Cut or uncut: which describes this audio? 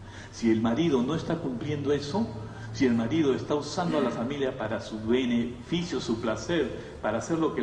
uncut